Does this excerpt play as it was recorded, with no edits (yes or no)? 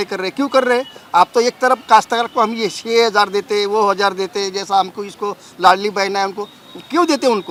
yes